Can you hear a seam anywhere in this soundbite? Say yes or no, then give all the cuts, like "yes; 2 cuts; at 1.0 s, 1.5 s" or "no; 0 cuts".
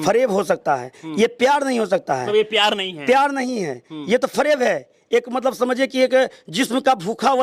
no; 0 cuts